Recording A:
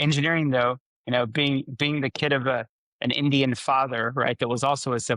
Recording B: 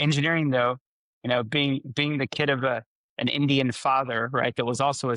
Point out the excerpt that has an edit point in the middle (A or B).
A